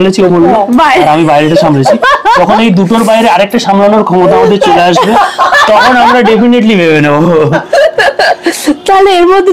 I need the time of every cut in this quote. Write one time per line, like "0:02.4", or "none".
none